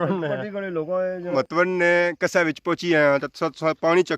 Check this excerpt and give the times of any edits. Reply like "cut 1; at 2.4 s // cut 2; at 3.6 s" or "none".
cut 1; at 1.3 s